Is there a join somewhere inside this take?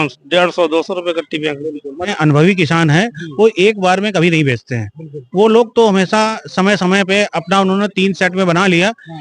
yes; 1 cut; at 2.1 s

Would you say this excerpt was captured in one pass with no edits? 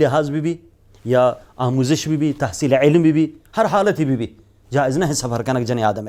yes; 0 cuts

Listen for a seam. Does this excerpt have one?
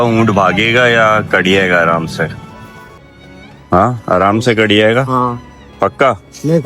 yes; 1 cut; at 3.1 s

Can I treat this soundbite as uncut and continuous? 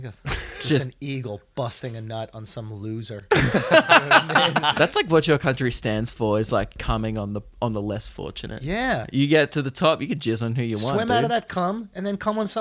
no; 3 cuts; at 4.7 s, 6.8 s, 9.1 s

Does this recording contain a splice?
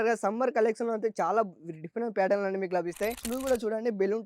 yes; 1 cut; at 3.3 s

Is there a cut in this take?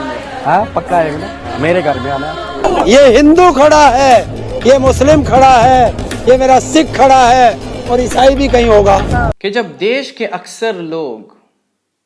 yes; 2 cuts; at 2.6 s, 9.3 s

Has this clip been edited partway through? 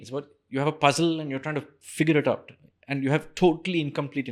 no; 0 cuts

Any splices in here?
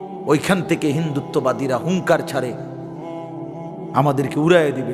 no; 0 cuts

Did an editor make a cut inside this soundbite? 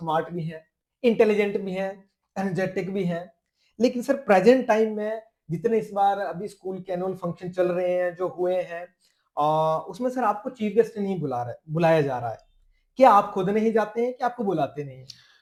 no; 0 cuts

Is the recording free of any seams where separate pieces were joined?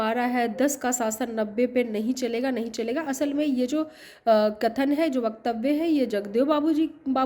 yes; 0 cuts

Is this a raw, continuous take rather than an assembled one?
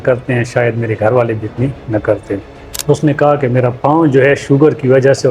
no; 1 cut; at 2.7 s

